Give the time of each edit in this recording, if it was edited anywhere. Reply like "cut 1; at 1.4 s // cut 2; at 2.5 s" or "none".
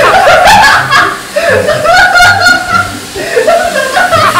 cut 1; at 1.4 s